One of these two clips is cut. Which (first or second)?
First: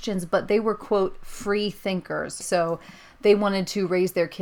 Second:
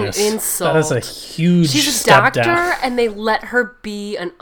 first